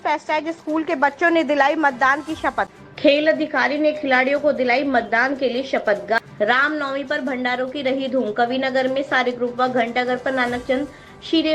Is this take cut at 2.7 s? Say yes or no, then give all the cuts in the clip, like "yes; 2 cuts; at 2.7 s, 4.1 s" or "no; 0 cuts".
yes; 2 cuts; at 2.7 s, 6.2 s